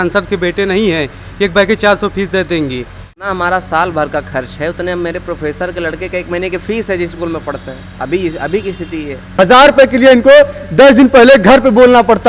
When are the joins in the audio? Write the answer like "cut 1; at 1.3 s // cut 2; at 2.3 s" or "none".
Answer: cut 1; at 3.1 s // cut 2; at 9.3 s